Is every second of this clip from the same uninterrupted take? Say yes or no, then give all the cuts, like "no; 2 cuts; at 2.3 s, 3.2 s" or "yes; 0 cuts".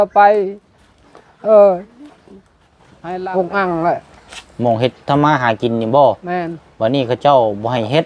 no; 1 cut; at 2.8 s